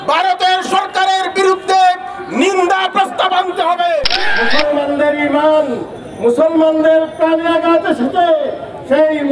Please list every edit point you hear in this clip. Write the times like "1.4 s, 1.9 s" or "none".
4.2 s